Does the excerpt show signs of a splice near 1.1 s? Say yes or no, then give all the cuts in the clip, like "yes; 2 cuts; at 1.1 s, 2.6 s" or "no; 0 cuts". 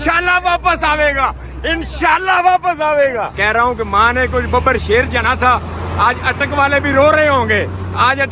no; 1 cut; at 3.3 s